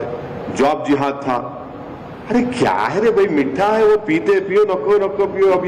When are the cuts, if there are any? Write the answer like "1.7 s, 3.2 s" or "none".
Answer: none